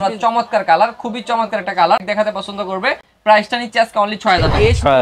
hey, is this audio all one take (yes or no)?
no